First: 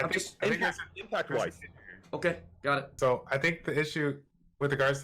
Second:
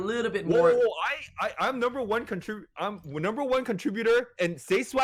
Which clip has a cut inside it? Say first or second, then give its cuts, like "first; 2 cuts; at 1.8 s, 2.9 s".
first; 1 cut; at 2.9 s